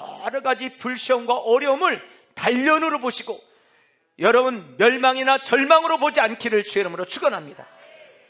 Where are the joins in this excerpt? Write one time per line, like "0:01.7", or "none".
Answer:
none